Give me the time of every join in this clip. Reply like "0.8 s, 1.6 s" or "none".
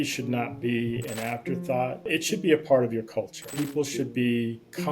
2.1 s, 3.4 s